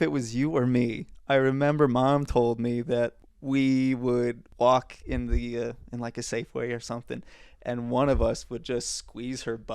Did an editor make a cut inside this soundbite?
yes; 3 cuts; at 1.1 s, 3.3 s, 4.4 s

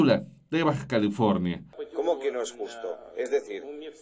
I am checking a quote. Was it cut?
yes; 1 cut; at 1.7 s

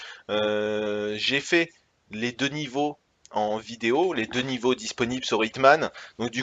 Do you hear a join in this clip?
yes; 1 cut; at 1.7 s

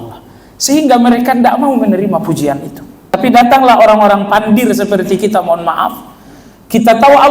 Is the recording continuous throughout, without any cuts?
no; 1 cut; at 3.1 s

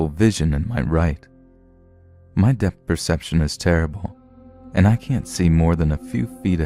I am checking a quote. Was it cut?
no; 0 cuts

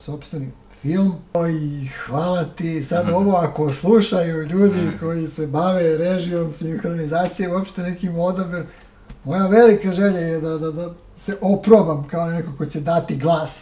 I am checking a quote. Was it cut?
yes; 1 cut; at 1.3 s

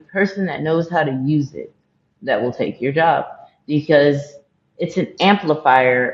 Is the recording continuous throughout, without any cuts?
yes; 0 cuts

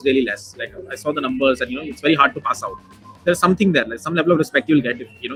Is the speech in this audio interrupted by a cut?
no; 0 cuts

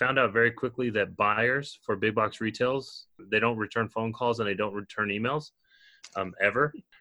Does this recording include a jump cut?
no; 0 cuts

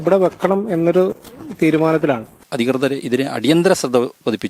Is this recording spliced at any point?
yes; 1 cut; at 2.4 s

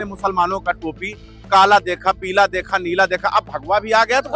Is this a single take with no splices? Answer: yes; 0 cuts

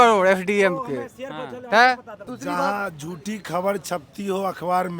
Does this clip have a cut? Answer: yes; 1 cut; at 2.2 s

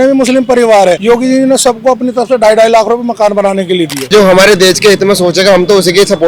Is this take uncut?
no; 2 cuts; at 1.0 s, 4.1 s

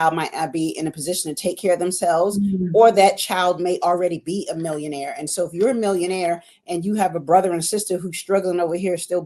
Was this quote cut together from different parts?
no; 0 cuts

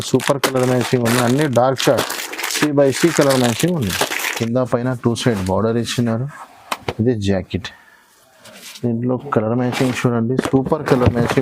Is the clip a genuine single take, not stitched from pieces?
no; 1 cut; at 4.2 s

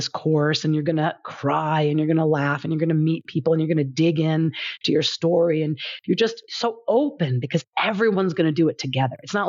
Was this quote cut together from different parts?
no; 0 cuts

